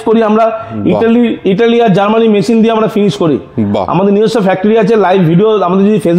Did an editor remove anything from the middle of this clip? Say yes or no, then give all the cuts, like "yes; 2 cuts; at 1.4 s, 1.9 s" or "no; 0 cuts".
no; 0 cuts